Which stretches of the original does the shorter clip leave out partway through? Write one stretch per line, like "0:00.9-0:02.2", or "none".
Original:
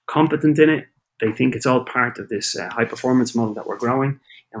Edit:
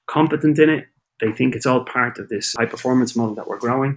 0:02.5-0:02.7